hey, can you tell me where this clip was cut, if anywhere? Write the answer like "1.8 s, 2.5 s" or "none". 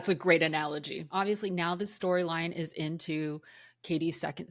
1.1 s